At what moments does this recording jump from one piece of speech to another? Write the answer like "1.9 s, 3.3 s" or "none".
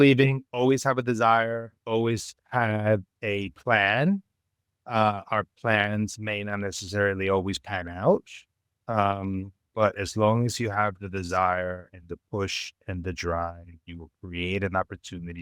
none